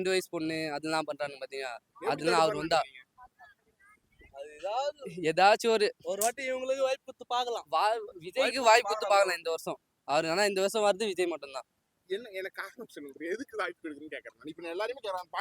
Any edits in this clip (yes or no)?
no